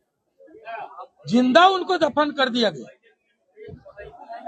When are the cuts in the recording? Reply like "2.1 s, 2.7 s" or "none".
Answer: none